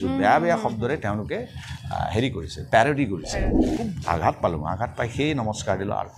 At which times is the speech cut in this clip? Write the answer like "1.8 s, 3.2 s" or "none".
3.6 s